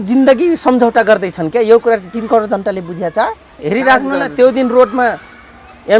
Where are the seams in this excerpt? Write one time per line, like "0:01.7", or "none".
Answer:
0:03.6